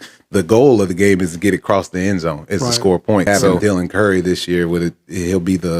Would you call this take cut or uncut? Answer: cut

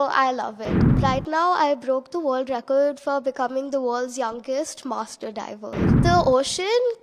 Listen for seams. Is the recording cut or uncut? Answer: cut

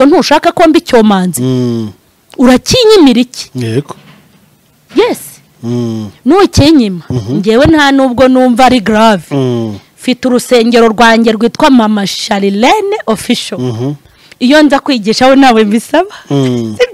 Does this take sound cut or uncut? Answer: uncut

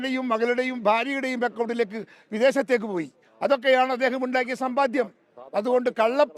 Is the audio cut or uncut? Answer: uncut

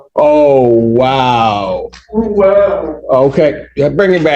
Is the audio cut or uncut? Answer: uncut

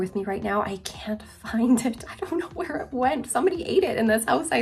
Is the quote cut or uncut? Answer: uncut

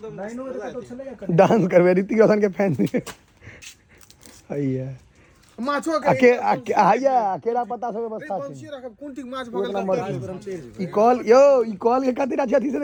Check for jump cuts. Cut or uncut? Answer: uncut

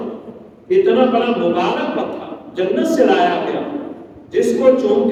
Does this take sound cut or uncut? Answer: uncut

